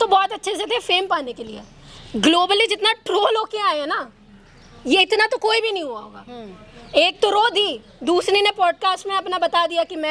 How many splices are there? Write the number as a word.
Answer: zero